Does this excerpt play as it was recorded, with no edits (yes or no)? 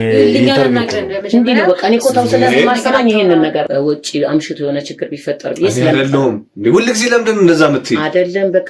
no